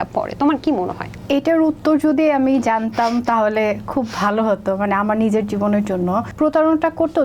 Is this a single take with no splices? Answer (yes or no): no